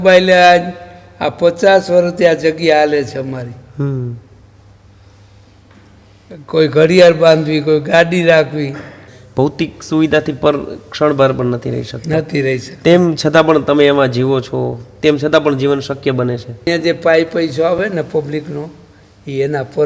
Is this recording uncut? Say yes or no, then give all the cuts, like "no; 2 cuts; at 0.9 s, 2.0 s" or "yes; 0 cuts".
no; 2 cuts; at 9.5 s, 16.7 s